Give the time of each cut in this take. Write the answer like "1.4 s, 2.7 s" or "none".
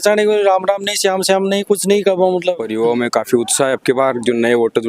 2.6 s